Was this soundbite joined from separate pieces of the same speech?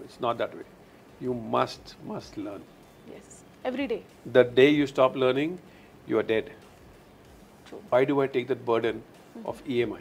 yes; 1 cut; at 7.9 s

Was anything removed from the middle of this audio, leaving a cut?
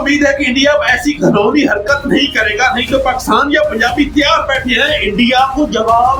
no; 0 cuts

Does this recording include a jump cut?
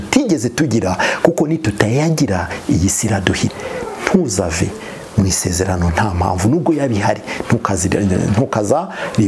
yes; 1 cut; at 3.5 s

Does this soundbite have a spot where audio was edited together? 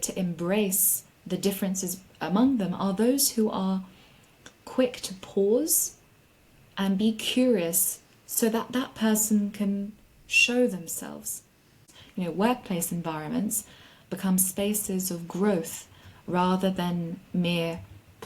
yes; 1 cut; at 11.8 s

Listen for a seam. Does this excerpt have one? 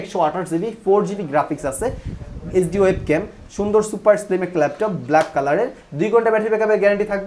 no; 0 cuts

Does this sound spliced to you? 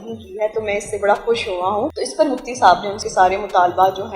yes; 2 cuts; at 1.9 s, 3.0 s

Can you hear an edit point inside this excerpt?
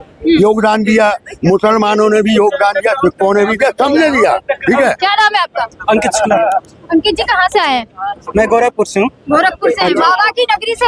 no; 0 cuts

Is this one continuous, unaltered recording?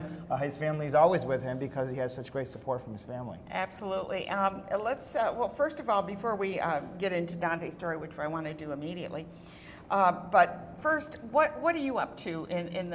yes; 0 cuts

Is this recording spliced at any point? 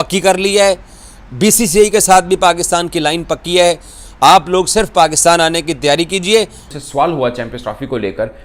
yes; 1 cut; at 6.7 s

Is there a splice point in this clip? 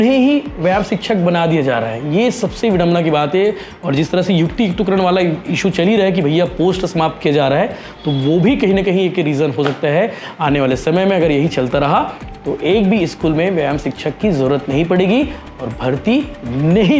no; 0 cuts

